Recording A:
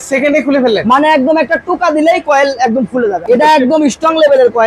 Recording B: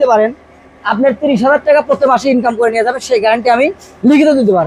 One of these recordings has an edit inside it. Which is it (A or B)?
A